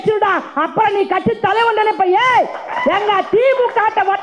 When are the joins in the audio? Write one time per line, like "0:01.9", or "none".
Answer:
none